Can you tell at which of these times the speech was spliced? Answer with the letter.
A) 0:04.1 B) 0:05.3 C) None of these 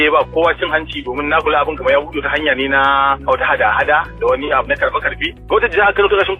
B